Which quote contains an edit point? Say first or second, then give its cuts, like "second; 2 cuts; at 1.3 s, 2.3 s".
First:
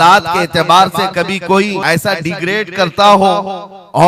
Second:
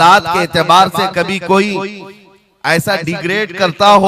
first; 1 cut; at 1.8 s